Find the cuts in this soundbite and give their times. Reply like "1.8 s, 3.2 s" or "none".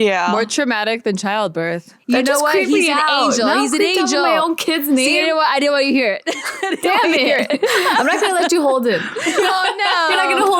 1.9 s, 7.7 s